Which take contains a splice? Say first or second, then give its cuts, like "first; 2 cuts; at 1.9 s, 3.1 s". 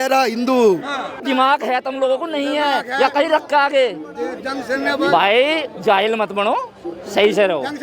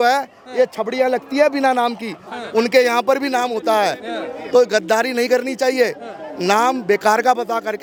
first; 1 cut; at 1.2 s